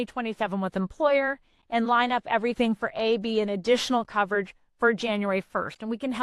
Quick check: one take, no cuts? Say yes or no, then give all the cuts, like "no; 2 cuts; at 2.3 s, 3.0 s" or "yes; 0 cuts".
yes; 0 cuts